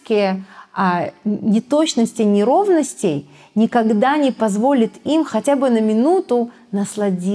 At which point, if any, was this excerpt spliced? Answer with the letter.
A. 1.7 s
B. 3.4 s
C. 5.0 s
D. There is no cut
D